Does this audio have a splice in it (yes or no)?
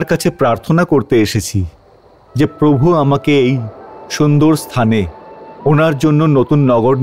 no